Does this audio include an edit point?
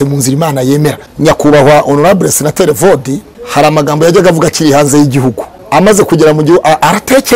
yes; 3 cuts; at 1.0 s, 3.3 s, 5.5 s

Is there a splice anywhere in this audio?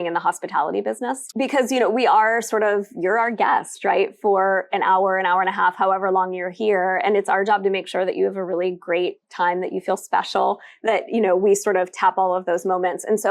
yes; 1 cut; at 1.2 s

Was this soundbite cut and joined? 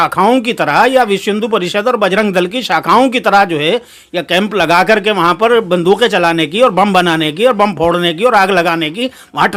no; 0 cuts

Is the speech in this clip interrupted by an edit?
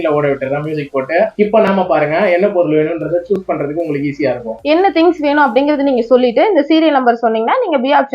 yes; 1 cut; at 4.5 s

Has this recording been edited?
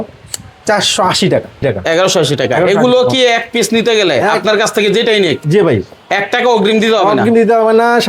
yes; 1 cut; at 1.6 s

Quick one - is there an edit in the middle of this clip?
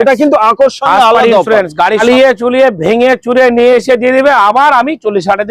yes; 1 cut; at 2.0 s

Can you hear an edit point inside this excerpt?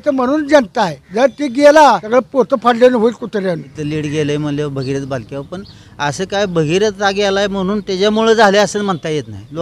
yes; 3 cuts; at 1.0 s, 2.0 s, 3.8 s

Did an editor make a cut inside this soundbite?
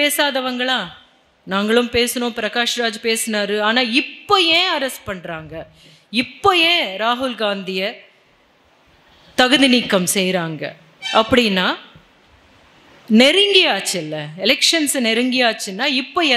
no; 0 cuts

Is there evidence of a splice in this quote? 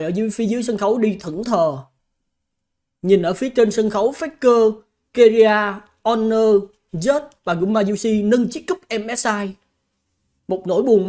no; 0 cuts

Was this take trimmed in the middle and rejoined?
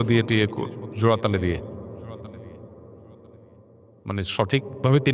no; 0 cuts

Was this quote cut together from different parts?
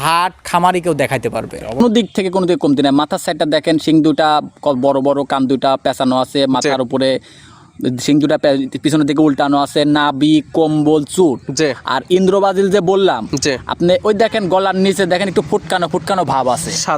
yes; 1 cut; at 1.8 s

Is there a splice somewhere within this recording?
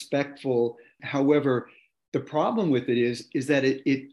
yes; 1 cut; at 1.0 s

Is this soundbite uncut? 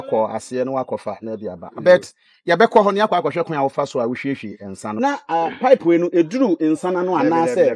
no; 1 cut; at 4.8 s

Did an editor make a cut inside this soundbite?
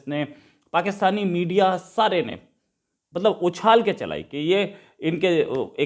no; 0 cuts

